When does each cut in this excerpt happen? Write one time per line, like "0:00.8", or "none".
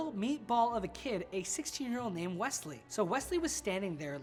none